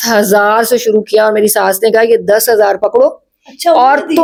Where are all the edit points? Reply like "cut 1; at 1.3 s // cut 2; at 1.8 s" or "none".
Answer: none